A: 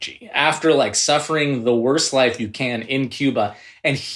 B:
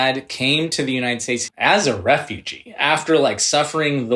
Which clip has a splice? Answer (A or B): B